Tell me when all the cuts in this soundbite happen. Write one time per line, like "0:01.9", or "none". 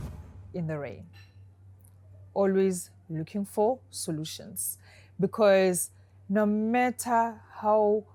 none